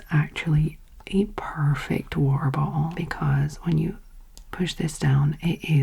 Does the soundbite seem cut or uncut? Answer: cut